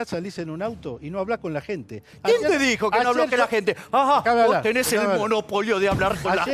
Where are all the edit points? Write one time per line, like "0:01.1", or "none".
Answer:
none